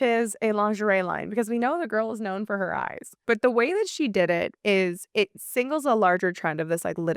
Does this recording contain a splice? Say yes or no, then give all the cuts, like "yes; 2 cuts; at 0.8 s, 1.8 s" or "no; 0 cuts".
no; 0 cuts